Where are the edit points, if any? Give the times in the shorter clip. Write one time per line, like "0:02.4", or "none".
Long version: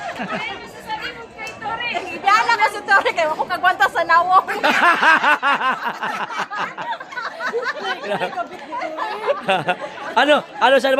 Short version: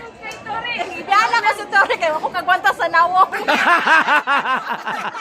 none

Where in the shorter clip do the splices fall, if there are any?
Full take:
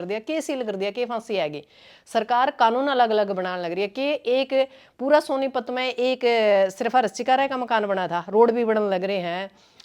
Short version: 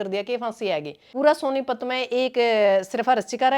0:01.0

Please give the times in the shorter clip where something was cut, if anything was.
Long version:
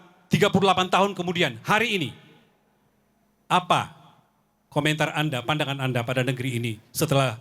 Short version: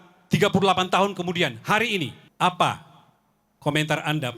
0:02.2

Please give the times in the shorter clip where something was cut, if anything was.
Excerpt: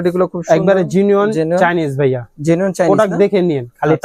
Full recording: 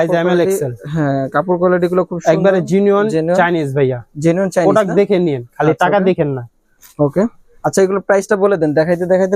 none

